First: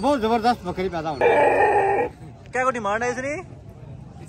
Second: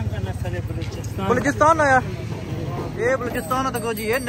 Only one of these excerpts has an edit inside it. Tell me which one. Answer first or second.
first